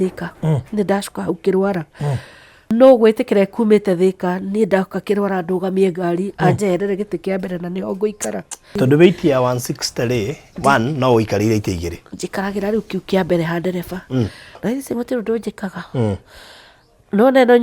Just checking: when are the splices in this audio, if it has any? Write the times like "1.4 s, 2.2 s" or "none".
2.7 s, 8.8 s, 14.5 s

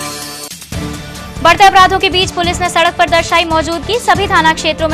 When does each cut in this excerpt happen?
0.9 s

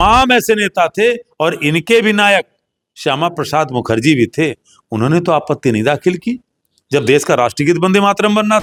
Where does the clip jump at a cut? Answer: none

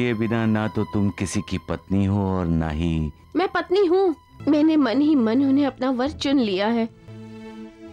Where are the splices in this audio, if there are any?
4.3 s, 7.1 s

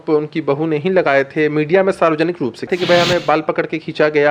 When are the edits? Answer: 2.7 s

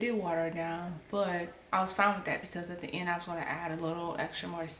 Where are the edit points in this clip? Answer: 1.6 s

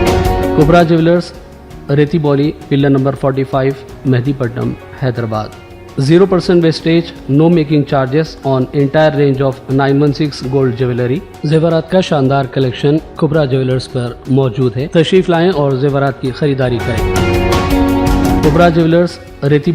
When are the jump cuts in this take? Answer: 18.4 s

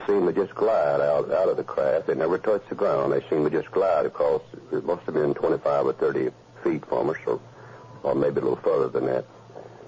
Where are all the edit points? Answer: none

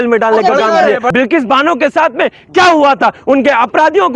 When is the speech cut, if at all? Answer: 1.1 s

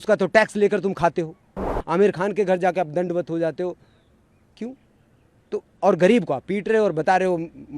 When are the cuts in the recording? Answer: 1.7 s

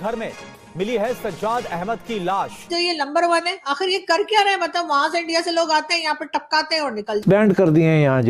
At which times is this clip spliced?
7.2 s

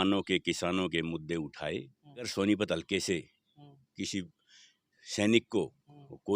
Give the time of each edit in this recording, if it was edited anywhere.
2.3 s

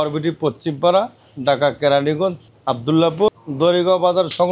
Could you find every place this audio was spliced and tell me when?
2.5 s, 3.3 s

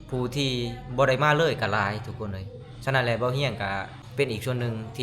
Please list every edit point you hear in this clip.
4.0 s

